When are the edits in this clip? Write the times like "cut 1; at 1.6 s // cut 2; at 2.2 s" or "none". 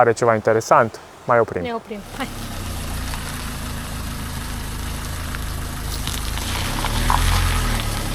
none